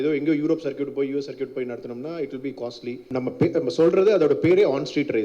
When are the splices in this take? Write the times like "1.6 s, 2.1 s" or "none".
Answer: 3.0 s